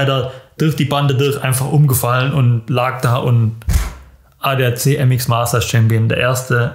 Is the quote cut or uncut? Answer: uncut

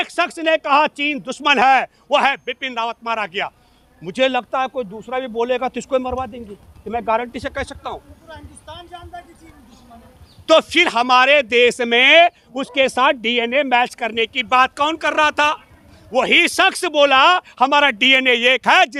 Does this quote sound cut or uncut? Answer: uncut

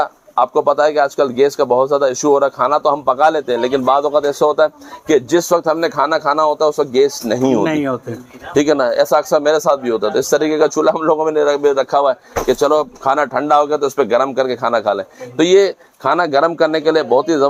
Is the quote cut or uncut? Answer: uncut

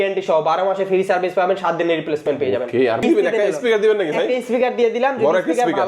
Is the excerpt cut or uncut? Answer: cut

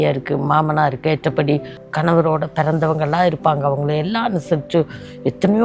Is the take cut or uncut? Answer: cut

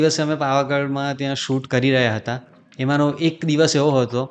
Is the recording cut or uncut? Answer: cut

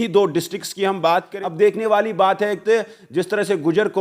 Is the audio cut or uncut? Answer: cut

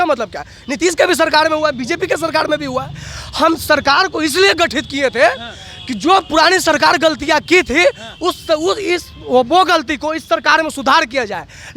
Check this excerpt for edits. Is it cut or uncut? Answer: uncut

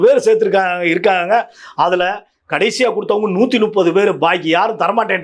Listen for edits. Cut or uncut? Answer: uncut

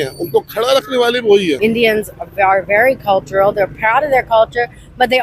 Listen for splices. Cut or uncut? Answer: cut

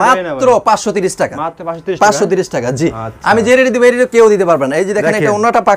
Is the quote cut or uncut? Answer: uncut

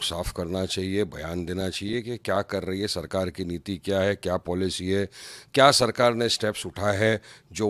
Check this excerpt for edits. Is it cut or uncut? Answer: uncut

